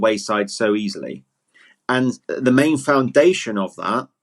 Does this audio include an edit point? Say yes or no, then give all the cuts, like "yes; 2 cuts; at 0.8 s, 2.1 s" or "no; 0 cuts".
yes; 1 cut; at 2.3 s